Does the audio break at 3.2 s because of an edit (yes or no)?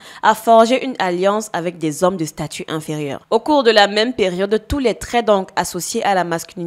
yes